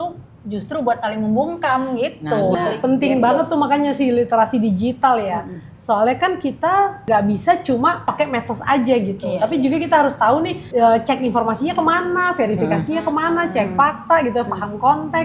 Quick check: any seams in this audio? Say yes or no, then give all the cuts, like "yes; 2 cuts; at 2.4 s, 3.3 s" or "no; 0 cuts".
yes; 4 cuts; at 2.5 s, 7.0 s, 8.2 s, 10.6 s